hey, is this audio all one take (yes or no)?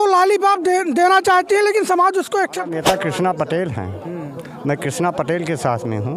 no